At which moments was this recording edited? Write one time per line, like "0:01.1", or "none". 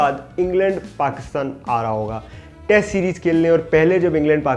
none